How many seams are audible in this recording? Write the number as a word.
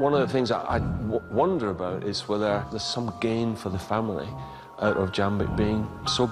one